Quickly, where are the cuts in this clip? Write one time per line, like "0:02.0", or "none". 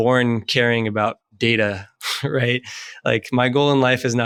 none